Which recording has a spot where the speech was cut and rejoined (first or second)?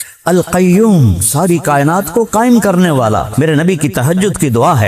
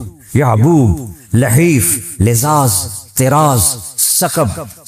first